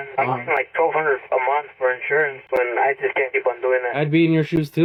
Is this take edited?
no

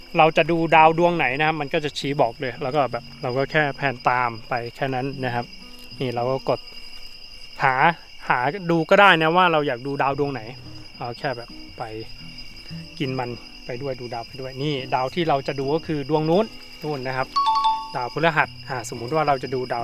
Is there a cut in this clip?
no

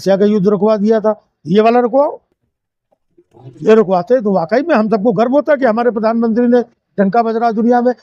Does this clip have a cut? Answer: no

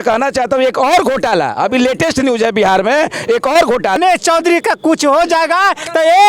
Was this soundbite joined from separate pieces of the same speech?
yes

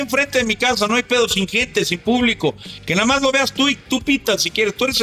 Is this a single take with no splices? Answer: yes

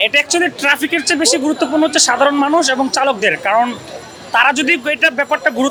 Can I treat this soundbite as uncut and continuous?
yes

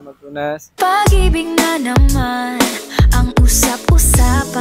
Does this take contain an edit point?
no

